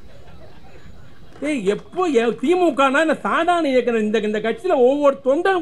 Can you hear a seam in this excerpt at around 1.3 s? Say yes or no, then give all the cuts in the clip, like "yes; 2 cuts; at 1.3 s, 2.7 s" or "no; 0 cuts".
yes; 1 cut; at 1.3 s